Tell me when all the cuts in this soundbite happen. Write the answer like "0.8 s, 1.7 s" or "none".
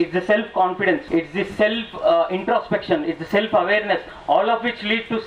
1.0 s